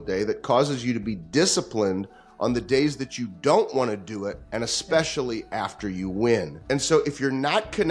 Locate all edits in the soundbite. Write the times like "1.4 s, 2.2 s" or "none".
4.4 s, 6.5 s